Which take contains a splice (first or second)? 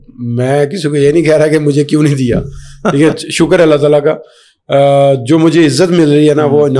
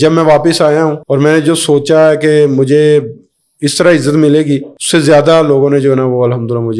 second